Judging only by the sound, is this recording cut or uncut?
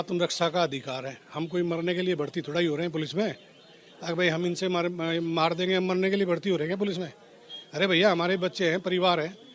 uncut